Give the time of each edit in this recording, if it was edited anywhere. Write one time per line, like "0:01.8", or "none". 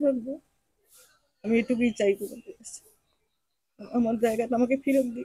none